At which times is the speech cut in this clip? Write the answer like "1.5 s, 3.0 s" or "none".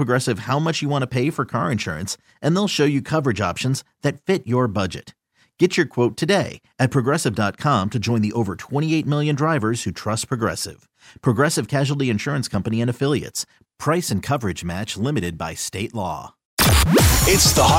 16.5 s